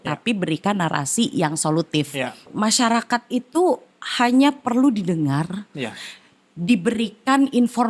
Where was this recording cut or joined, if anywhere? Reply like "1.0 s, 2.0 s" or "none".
2.5 s